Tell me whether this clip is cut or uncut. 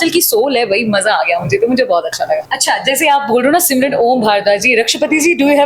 cut